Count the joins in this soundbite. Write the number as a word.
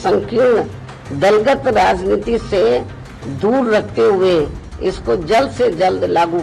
one